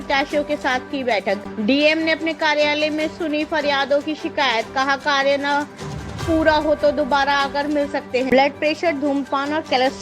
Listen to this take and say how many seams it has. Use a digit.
2